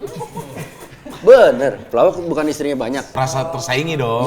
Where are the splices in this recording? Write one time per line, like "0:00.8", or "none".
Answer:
0:03.1